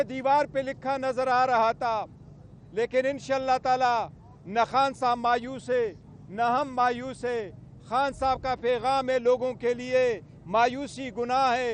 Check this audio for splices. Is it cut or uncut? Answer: uncut